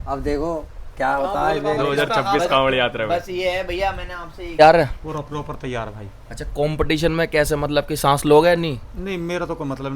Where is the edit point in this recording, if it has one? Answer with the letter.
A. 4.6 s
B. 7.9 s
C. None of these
A